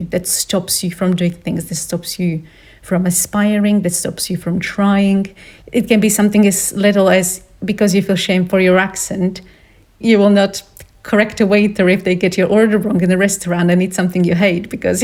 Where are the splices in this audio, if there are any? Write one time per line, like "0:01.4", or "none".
none